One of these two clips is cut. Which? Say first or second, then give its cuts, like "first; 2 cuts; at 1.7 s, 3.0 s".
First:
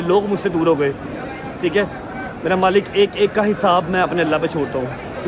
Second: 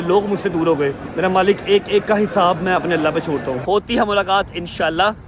second; 2 cuts; at 1.0 s, 3.6 s